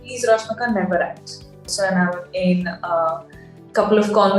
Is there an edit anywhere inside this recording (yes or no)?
yes